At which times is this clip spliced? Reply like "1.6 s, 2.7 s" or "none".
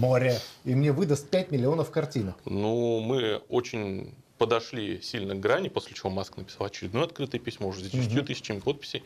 2.4 s